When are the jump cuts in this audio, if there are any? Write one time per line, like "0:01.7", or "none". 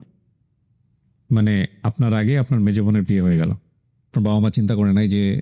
none